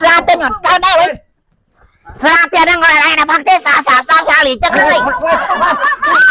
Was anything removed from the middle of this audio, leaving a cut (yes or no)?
yes